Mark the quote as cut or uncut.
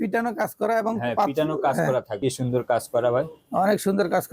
cut